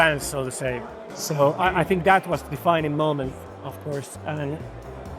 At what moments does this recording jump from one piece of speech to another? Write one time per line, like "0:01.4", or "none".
none